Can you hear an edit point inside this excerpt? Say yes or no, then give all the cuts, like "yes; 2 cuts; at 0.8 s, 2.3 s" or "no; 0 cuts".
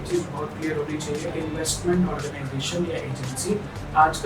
yes; 1 cut; at 1.3 s